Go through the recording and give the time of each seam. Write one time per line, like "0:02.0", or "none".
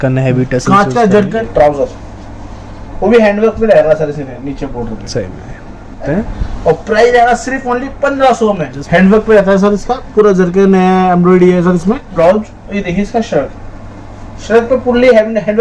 0:01.4
0:06.1
0:08.8
0:12.1